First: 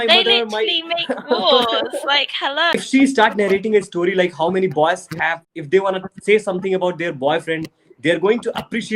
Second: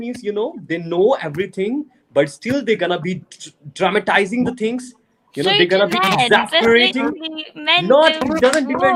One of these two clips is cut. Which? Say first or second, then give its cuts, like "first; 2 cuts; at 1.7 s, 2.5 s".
first; 2 cuts; at 2.8 s, 5.4 s